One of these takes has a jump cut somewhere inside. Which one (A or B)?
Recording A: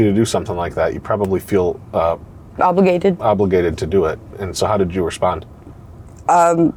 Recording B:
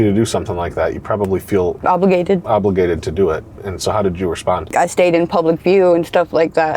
B